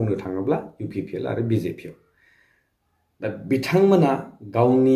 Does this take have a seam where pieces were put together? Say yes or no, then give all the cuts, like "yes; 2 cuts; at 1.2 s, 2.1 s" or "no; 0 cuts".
no; 0 cuts